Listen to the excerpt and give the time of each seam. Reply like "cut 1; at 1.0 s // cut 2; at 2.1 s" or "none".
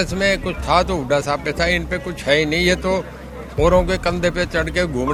none